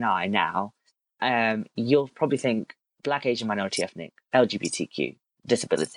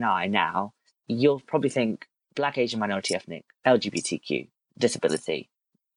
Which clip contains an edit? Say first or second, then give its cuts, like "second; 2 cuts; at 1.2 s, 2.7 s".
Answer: second; 1 cut; at 1.0 s